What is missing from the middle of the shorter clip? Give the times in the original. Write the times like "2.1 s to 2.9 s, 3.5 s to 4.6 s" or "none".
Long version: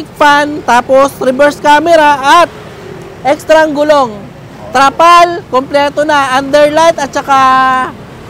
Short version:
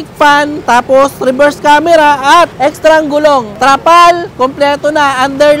2.5 s to 3.2 s, 4.1 s to 4.6 s